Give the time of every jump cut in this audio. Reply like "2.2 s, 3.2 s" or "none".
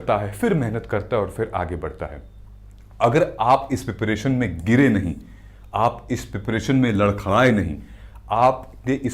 none

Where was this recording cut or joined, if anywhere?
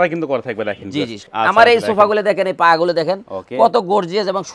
1.2 s

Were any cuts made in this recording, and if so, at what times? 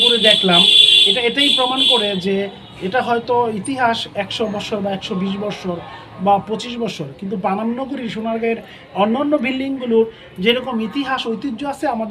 none

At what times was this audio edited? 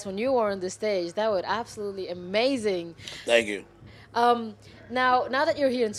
none

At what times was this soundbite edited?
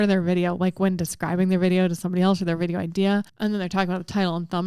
3.3 s

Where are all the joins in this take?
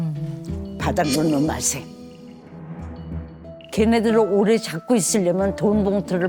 2.4 s

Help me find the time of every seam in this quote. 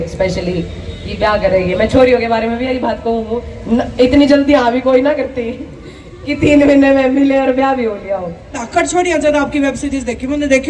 8.5 s

